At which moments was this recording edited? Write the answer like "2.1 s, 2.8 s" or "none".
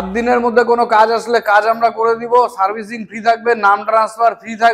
none